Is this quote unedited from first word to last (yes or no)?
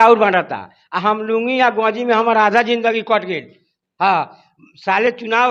yes